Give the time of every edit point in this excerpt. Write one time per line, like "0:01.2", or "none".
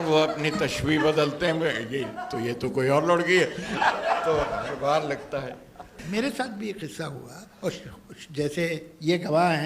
0:06.0